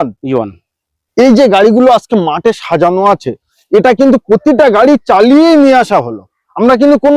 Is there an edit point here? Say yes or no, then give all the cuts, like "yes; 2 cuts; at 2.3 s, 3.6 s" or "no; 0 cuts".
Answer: yes; 1 cut; at 1.0 s